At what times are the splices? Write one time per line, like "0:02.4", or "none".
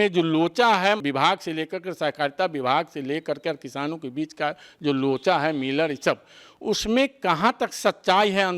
0:01.0